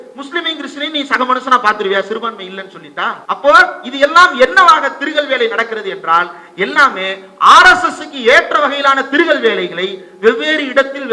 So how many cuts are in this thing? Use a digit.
1